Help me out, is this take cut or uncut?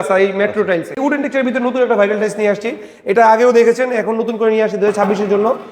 cut